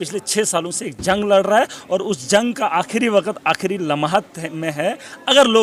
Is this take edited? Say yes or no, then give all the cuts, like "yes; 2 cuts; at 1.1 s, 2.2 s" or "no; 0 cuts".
no; 0 cuts